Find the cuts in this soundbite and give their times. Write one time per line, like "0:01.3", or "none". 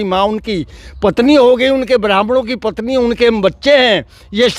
none